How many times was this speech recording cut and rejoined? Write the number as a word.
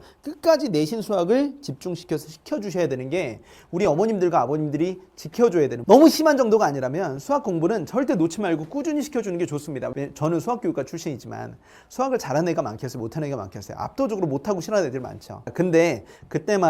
three